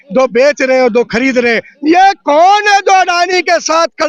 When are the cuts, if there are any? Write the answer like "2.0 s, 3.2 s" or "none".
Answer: none